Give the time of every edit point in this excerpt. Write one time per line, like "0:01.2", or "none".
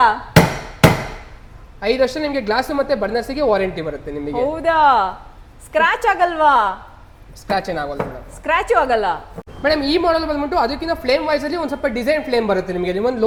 none